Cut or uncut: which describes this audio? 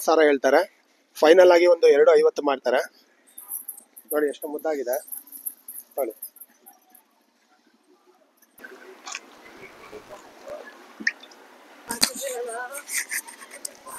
uncut